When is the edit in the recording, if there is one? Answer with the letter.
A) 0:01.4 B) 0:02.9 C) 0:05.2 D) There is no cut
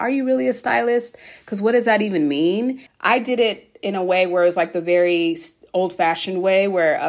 B